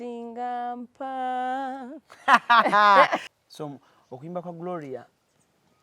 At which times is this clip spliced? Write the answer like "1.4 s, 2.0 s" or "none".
3.2 s